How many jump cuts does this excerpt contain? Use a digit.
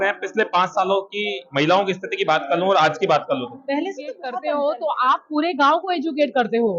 1